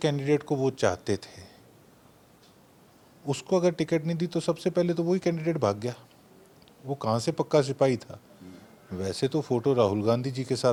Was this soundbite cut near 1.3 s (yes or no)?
no